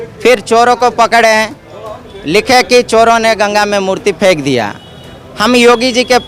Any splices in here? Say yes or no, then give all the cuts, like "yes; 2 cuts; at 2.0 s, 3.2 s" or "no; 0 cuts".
no; 0 cuts